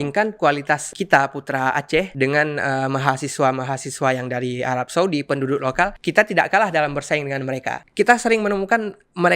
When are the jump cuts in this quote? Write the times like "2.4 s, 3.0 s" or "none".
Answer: none